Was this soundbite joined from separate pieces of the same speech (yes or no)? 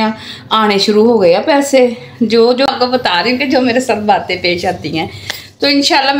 yes